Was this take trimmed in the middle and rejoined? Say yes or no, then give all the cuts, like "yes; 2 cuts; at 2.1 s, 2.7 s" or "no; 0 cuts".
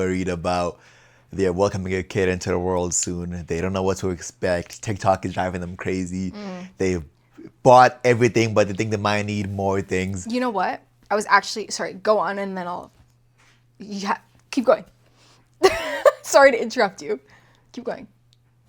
no; 0 cuts